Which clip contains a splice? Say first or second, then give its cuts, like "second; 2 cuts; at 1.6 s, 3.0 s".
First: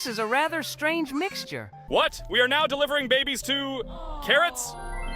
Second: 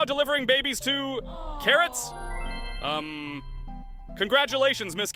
first; 1 cut; at 1.7 s